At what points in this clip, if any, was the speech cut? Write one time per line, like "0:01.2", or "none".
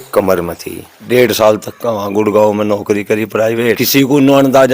0:01.0
0:03.8